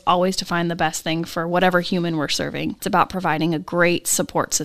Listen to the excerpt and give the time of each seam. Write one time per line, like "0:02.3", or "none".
none